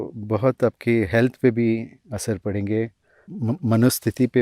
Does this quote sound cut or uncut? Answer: cut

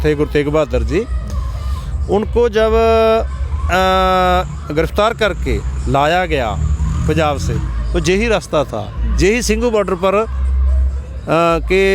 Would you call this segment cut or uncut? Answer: uncut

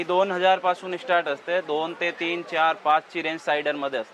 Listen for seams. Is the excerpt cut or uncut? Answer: uncut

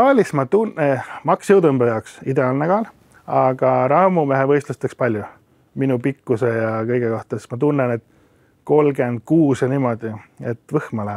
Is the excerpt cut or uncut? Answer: uncut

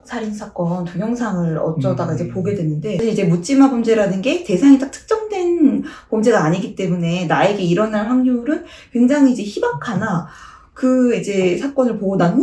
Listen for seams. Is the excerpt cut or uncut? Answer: cut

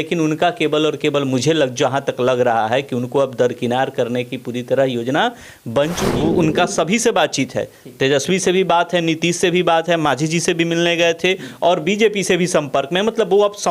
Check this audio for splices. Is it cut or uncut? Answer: cut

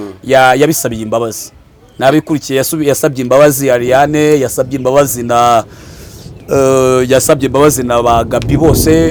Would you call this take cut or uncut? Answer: uncut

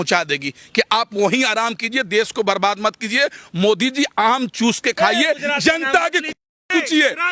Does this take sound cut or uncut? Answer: uncut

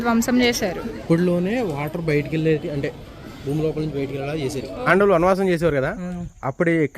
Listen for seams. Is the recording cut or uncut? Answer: cut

